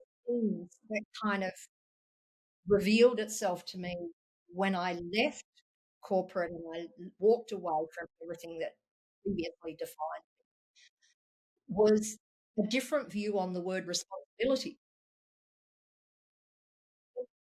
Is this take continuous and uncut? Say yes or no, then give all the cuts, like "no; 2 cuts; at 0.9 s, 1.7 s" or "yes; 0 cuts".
yes; 0 cuts